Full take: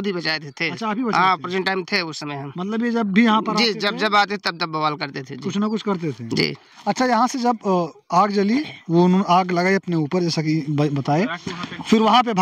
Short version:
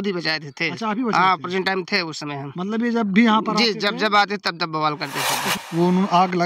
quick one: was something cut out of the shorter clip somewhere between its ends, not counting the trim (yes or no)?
yes